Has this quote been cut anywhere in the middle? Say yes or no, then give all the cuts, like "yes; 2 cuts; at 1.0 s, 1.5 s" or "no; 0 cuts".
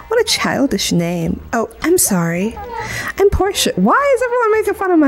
no; 0 cuts